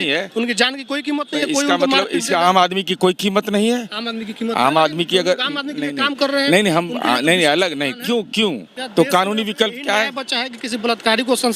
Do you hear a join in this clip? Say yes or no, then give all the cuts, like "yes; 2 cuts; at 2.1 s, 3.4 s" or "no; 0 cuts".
yes; 1 cut; at 8.7 s